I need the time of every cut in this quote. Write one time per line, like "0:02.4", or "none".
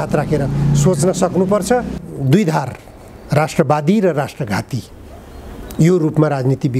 0:02.0